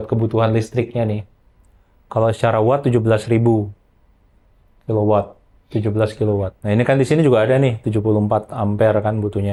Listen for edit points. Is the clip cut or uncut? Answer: uncut